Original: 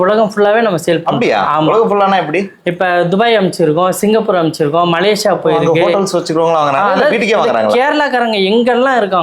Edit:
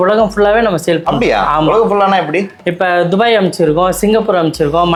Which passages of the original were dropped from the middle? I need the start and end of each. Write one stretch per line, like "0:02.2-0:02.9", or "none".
none